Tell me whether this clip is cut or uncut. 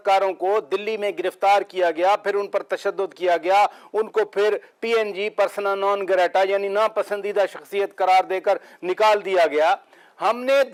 uncut